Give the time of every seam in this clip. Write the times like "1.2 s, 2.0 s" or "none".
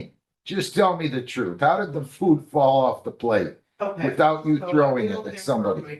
none